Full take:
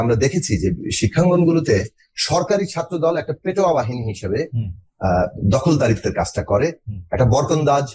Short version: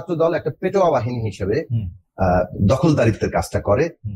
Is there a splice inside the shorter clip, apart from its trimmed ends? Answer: no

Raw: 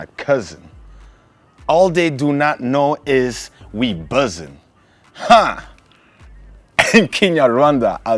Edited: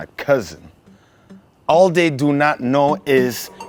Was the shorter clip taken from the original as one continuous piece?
yes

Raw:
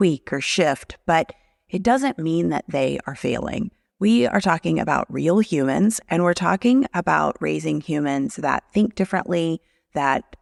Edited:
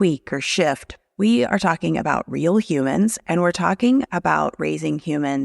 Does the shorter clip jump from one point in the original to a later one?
yes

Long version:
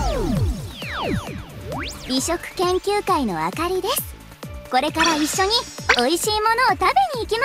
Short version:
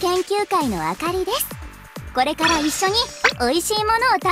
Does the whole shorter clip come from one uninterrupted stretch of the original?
yes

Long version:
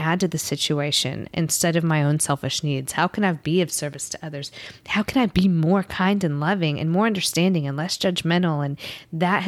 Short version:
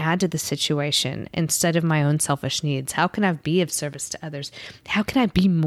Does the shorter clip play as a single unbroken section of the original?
yes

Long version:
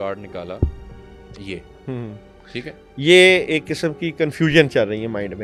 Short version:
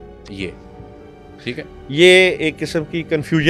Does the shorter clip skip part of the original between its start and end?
no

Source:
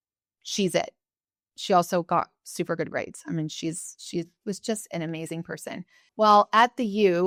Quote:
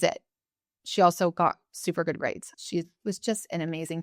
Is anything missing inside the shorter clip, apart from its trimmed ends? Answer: yes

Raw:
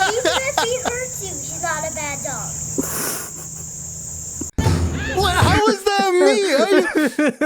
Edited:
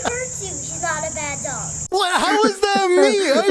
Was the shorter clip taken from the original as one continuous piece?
no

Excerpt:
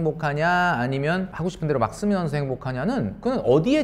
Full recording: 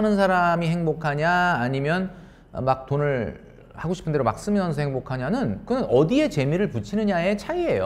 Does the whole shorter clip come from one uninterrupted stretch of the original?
no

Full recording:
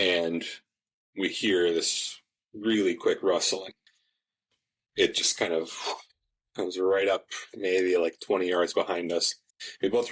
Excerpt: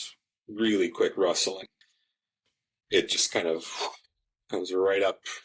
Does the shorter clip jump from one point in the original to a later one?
no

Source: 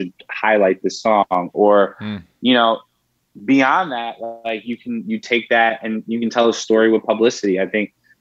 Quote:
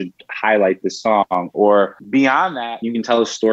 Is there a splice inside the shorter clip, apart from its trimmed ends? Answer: yes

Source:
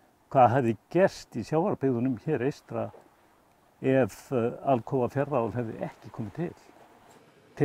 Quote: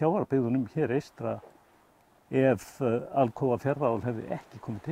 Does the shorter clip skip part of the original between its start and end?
no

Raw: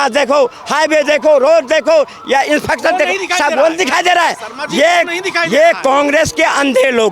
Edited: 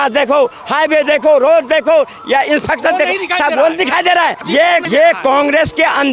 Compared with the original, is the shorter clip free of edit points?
no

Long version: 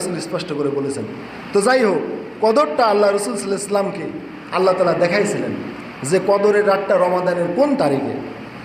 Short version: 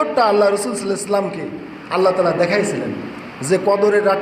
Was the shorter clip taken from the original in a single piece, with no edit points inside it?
yes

